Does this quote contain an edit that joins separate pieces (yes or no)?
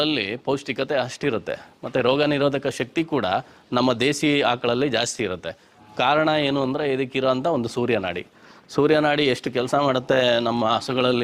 no